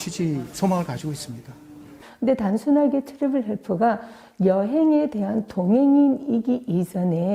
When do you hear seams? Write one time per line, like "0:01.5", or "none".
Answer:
0:02.1

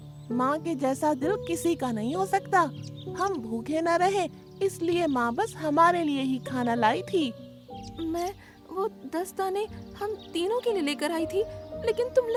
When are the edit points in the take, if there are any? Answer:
none

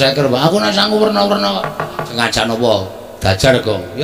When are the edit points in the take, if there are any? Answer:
0:02.1

